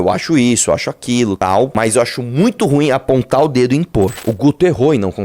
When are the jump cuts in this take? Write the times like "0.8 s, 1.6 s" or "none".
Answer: 1.4 s, 4.2 s